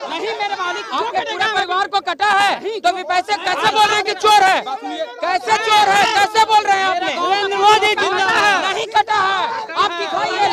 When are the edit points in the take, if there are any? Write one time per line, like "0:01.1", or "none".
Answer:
none

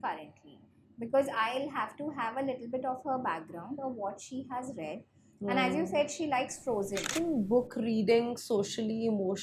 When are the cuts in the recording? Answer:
0:07.1

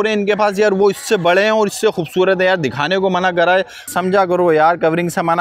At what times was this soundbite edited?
0:03.9

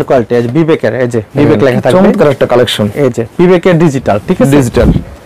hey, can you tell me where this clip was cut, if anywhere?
none

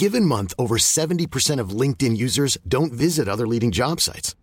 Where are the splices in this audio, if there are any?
none

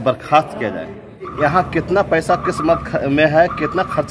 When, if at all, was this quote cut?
0:01.3

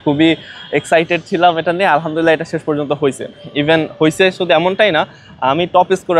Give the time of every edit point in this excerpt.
none

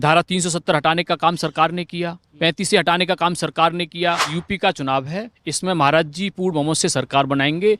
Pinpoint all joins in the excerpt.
0:04.3

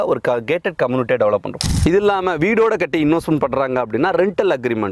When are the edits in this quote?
0:01.6

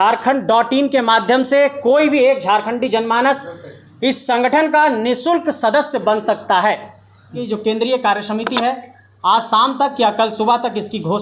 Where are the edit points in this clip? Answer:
0:07.3

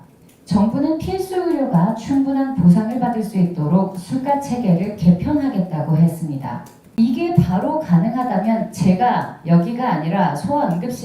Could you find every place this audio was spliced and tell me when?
0:06.9

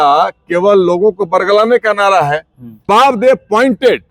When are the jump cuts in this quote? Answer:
0:02.9

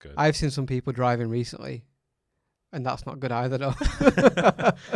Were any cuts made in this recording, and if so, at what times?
none

